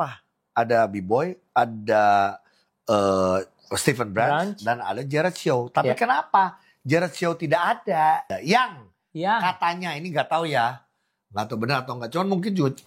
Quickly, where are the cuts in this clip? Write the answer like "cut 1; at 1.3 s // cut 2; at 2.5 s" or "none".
cut 1; at 8.3 s